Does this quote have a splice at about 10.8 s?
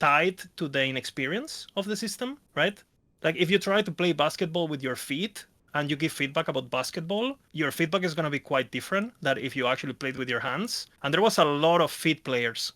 yes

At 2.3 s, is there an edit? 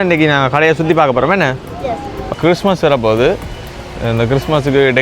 yes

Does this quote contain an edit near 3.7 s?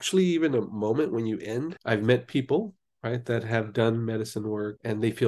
no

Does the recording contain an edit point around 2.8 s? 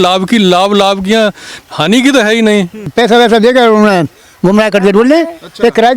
yes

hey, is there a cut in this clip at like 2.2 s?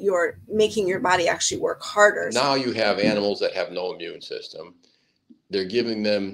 yes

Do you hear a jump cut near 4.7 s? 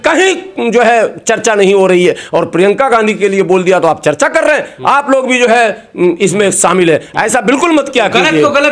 no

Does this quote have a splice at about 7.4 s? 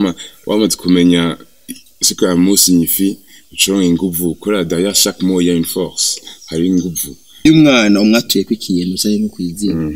yes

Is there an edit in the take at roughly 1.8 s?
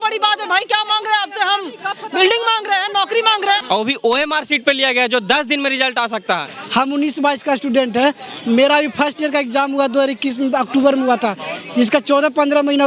no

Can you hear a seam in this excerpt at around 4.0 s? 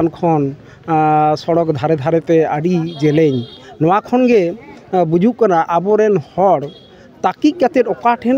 no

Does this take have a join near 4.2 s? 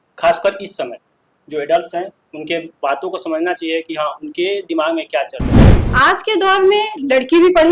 no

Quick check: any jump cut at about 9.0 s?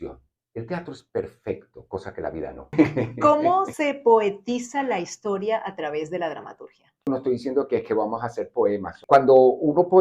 yes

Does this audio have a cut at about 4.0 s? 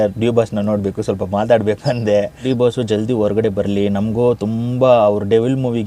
no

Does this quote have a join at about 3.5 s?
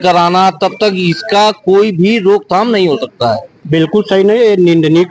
yes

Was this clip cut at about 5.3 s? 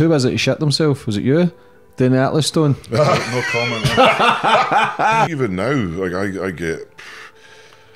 yes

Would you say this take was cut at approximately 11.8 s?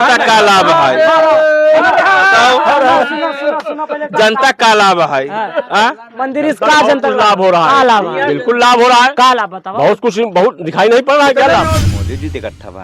yes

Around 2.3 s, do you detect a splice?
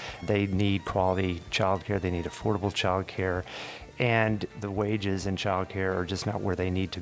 no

